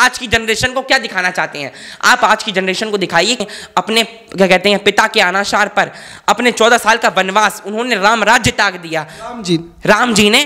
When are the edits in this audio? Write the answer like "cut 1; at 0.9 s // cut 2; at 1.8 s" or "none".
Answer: none